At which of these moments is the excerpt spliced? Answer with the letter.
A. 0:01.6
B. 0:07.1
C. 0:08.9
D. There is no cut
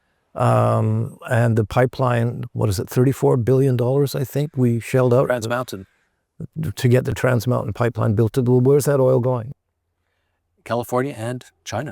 B